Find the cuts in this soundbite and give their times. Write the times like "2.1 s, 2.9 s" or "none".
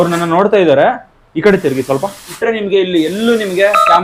2.3 s